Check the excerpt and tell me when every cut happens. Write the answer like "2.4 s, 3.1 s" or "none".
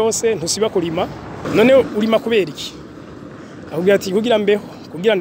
1.4 s

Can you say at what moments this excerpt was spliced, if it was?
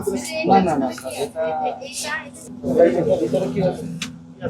none

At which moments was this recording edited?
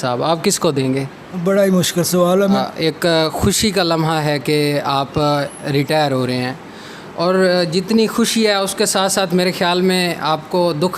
2.6 s

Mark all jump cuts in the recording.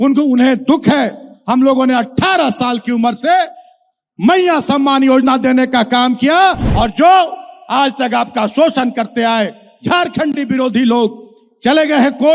6.7 s

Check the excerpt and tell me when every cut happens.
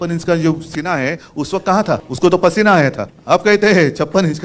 2.1 s, 3.1 s

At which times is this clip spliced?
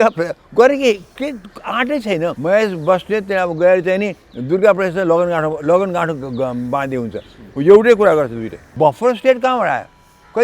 2.4 s, 8.6 s

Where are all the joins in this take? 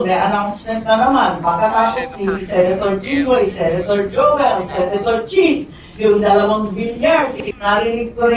7.4 s

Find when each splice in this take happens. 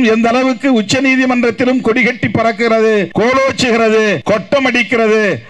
3.1 s, 4.2 s

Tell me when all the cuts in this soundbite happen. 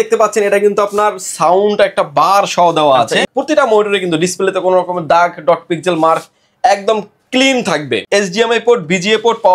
3.3 s, 8.0 s

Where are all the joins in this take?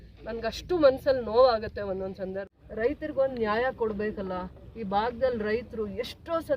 2.4 s

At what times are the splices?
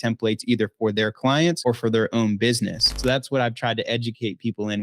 1.6 s, 3.0 s

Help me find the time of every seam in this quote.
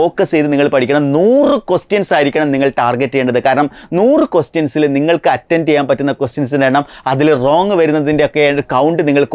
none

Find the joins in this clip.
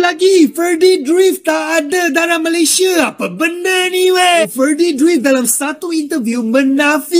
4.4 s

